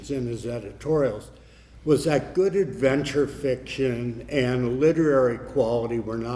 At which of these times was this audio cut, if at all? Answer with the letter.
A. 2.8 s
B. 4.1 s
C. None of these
C